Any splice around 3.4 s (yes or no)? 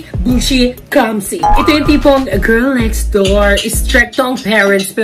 no